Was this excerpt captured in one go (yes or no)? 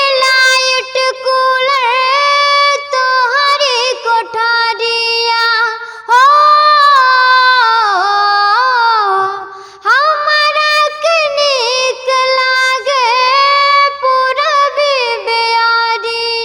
yes